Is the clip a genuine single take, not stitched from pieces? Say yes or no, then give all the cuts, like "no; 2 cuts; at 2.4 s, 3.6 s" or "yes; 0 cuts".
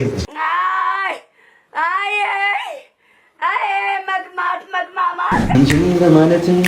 no; 1 cut; at 5.5 s